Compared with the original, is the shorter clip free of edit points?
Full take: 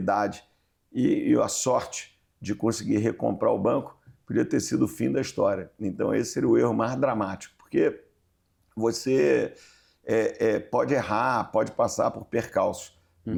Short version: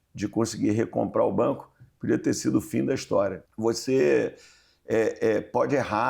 no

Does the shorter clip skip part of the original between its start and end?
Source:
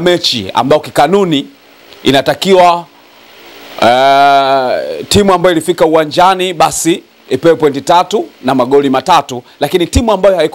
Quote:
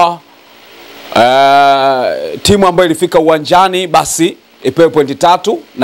no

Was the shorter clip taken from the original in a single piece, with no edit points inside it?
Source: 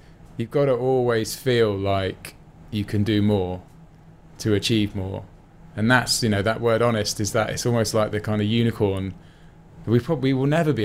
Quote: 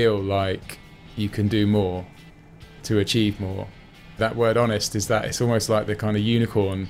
no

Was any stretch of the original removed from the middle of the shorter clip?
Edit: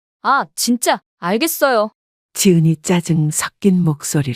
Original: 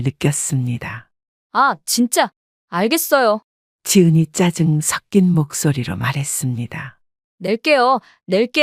yes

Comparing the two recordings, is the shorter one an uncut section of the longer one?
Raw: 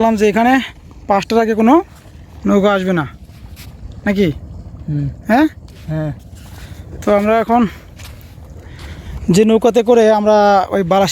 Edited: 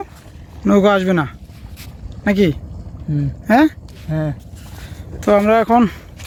yes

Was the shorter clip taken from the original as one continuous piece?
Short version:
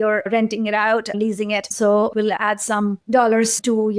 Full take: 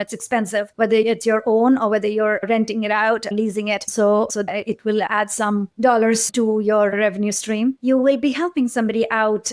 no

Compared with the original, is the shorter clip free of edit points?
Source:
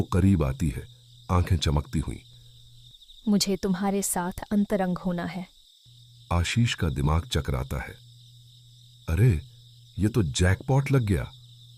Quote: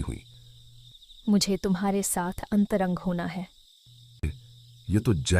no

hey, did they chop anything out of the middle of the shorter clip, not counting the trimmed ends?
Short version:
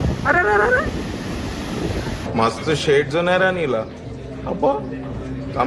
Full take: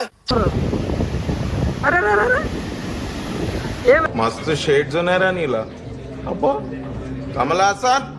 yes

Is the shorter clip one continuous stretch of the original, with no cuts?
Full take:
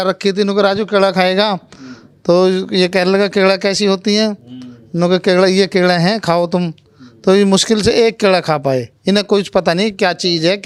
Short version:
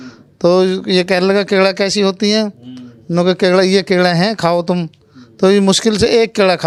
yes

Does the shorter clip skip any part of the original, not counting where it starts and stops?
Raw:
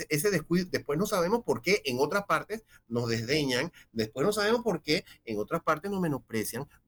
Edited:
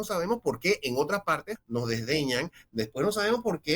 yes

